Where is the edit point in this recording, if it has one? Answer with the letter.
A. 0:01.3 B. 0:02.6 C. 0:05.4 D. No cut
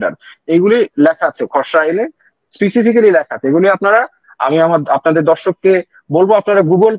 D